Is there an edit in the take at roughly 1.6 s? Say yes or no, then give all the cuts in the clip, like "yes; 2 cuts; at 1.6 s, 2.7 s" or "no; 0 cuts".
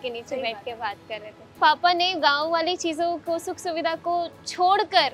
yes; 1 cut; at 1.6 s